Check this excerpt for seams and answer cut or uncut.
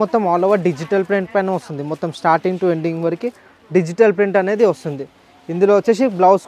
uncut